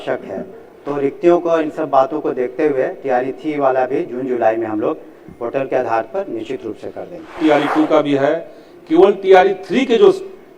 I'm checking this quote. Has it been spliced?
yes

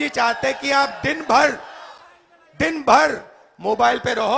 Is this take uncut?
yes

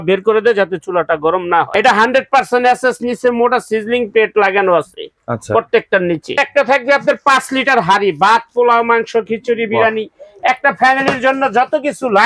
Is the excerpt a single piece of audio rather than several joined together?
no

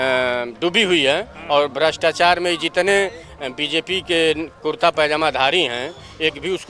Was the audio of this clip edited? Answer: no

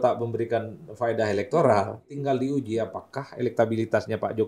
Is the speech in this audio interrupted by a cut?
yes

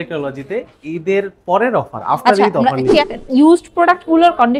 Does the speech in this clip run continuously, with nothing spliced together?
no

